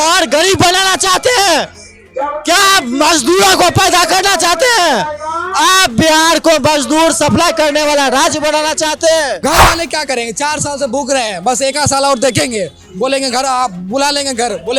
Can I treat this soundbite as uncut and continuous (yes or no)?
no